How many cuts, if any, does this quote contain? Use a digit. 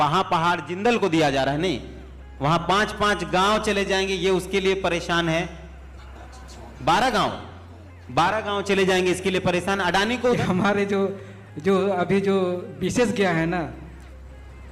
1